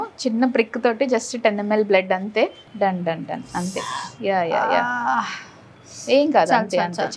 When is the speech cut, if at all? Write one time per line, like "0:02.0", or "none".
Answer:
0:02.6